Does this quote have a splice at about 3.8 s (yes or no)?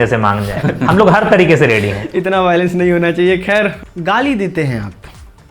yes